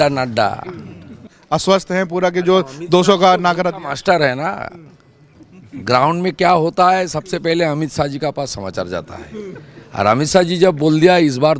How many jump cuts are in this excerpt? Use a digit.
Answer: 1